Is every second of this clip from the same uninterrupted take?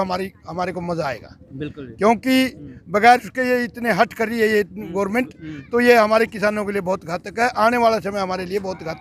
yes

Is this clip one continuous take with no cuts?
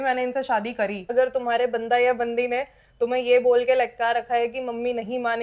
no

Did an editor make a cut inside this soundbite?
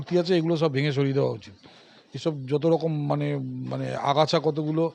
no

